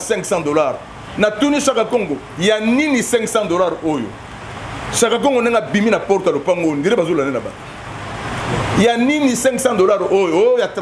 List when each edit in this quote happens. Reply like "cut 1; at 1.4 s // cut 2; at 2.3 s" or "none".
none